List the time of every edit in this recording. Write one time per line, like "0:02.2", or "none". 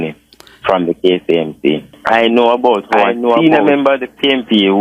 0:01.9